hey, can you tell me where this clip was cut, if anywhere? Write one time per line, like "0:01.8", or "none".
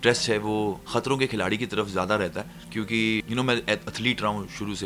none

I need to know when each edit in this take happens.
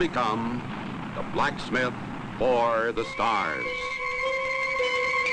0:03.7

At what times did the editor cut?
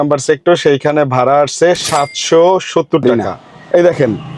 0:03.0

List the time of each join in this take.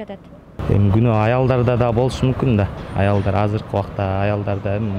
none

